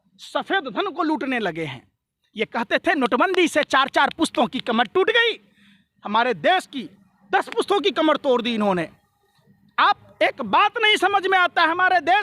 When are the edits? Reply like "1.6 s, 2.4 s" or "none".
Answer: none